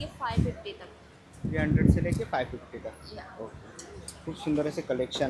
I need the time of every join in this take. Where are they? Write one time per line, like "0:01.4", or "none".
none

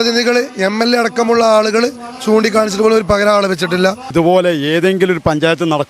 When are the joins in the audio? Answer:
0:04.0

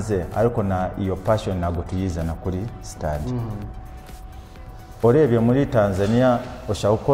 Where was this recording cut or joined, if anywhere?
0:04.6

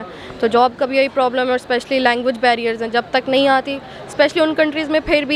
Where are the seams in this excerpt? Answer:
none

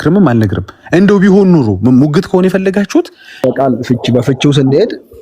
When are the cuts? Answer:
0:03.4

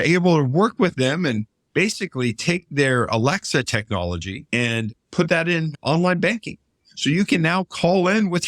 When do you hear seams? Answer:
0:04.3
0:05.7

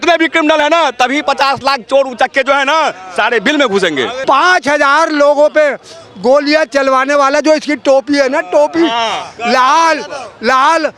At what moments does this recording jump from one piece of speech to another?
0:04.2

